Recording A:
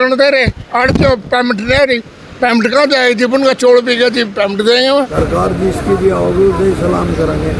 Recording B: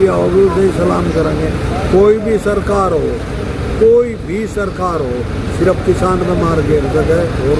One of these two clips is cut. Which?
A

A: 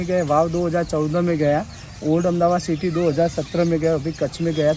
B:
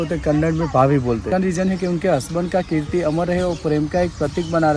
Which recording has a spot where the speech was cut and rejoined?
B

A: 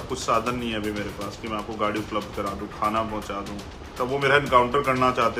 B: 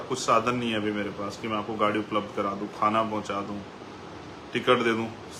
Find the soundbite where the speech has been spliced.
A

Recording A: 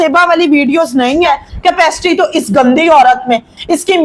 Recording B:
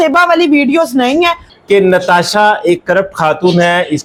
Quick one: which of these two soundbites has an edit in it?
A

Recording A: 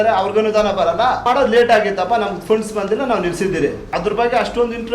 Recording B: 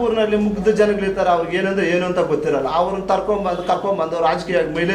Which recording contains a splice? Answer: A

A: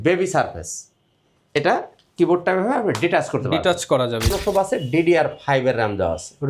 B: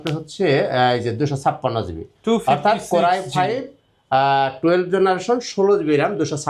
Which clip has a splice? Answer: A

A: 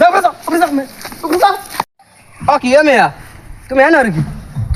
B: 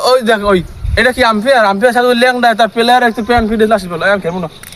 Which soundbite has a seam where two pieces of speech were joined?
A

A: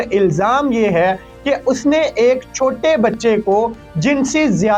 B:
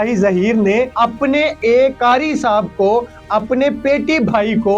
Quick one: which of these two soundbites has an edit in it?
B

